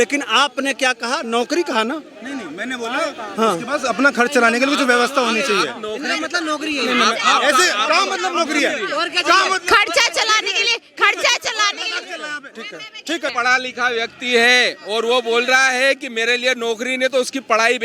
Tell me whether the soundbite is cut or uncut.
cut